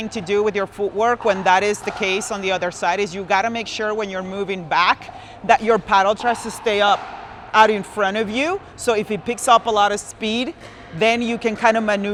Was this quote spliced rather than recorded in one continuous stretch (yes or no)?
no